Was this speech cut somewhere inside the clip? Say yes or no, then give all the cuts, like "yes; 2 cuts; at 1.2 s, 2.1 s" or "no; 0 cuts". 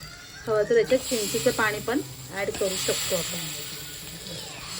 no; 0 cuts